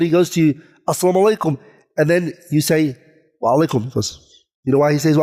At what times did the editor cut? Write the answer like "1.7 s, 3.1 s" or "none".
none